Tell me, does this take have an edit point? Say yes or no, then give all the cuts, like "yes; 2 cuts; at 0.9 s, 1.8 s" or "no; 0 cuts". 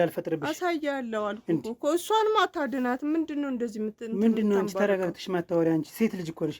no; 0 cuts